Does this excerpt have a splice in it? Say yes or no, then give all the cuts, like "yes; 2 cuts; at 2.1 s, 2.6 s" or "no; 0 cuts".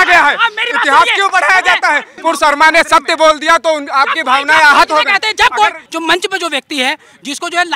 yes; 2 cuts; at 2.1 s, 5.8 s